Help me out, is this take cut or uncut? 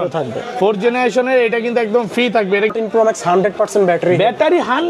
cut